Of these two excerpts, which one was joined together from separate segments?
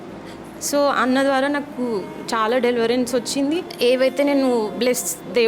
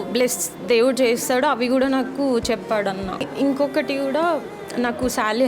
second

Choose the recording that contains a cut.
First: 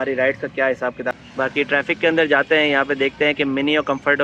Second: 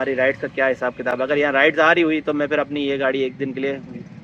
first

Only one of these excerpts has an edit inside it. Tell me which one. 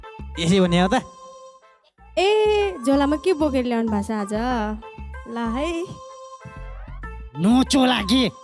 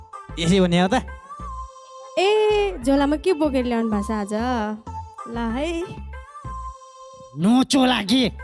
first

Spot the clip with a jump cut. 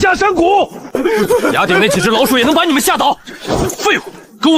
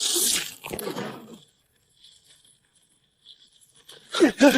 first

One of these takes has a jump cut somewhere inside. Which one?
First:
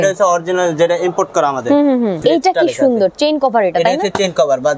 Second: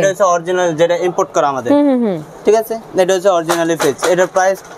first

